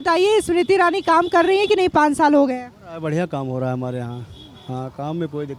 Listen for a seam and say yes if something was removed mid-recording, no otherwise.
no